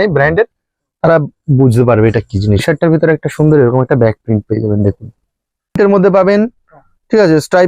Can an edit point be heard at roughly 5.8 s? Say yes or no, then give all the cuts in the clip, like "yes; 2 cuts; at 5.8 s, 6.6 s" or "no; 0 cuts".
yes; 2 cuts; at 2.6 s, 5.8 s